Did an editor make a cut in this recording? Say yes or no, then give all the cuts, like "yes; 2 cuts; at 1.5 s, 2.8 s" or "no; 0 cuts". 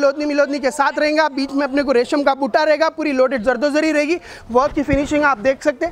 yes; 1 cut; at 4.3 s